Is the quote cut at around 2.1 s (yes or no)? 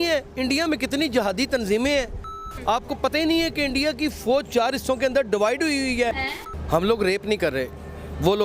yes